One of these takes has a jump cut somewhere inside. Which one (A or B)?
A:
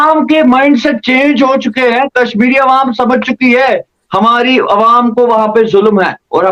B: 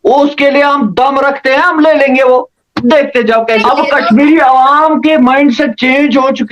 B